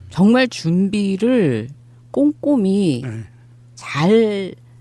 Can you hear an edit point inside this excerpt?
yes; 1 cut; at 3.8 s

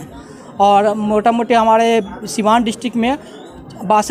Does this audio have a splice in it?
no; 0 cuts

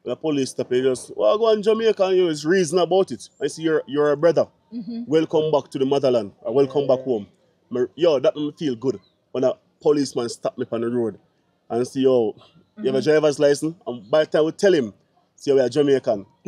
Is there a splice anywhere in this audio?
no; 0 cuts

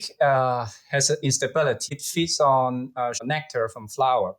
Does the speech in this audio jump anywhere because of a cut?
yes; 2 cuts; at 2.0 s, 3.2 s

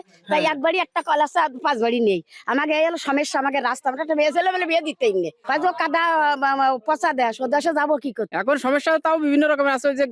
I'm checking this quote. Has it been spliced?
yes; 2 cuts; at 5.4 s, 8.3 s

